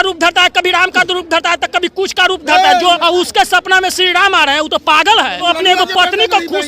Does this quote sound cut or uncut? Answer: cut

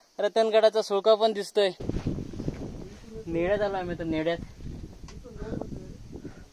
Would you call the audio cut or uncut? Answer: cut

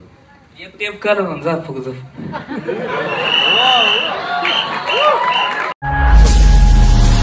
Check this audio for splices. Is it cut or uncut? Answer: cut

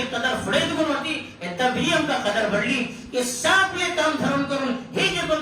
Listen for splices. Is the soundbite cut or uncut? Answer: uncut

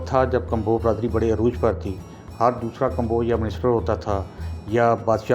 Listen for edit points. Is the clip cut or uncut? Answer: uncut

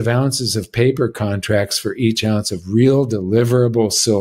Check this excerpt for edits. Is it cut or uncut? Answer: uncut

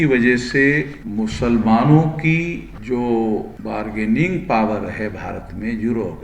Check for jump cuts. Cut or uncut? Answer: cut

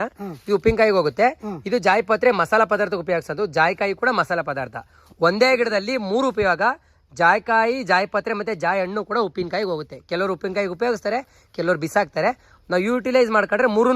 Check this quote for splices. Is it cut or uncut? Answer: uncut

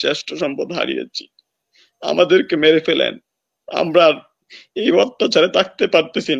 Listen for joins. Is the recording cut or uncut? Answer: uncut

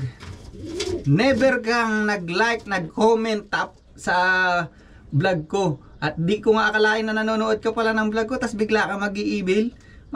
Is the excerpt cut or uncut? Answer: uncut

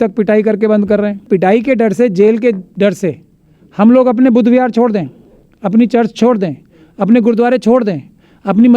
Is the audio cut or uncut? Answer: cut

